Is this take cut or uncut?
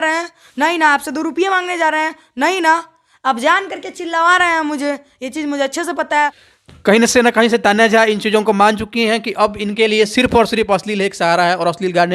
uncut